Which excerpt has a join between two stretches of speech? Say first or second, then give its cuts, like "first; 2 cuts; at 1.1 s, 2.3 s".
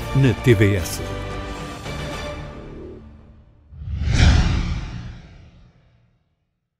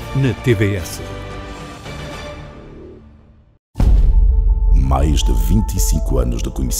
second; 1 cut; at 3.6 s